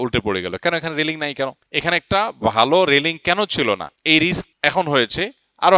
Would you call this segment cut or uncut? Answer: cut